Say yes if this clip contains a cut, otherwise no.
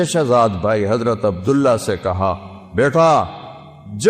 no